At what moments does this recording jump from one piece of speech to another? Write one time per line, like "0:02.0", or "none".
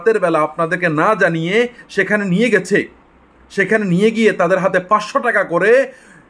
none